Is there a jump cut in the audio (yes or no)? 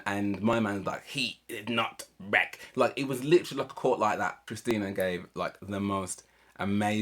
yes